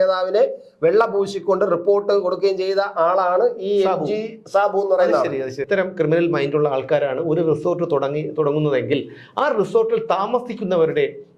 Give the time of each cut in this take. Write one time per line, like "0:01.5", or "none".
0:05.6